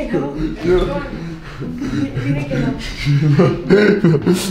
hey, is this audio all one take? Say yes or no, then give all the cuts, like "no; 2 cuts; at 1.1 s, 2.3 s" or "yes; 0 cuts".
yes; 0 cuts